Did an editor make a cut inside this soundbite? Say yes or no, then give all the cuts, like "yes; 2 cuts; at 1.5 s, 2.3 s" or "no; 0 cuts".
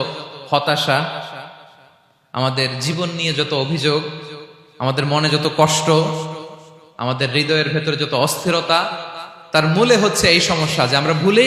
no; 0 cuts